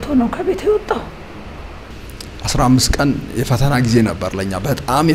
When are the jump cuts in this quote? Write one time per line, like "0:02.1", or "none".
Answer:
0:02.0